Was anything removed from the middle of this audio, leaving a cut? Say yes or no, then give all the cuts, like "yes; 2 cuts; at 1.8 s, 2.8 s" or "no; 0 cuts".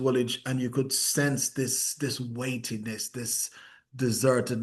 no; 0 cuts